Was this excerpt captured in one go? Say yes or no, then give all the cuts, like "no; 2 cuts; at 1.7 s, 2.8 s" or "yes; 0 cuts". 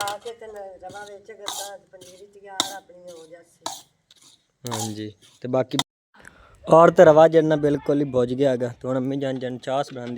no; 1 cut; at 5.8 s